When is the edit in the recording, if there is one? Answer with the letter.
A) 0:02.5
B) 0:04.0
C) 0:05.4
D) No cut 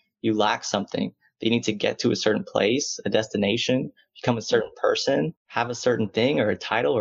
C